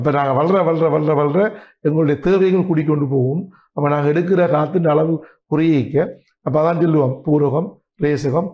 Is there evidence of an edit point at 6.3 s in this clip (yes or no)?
no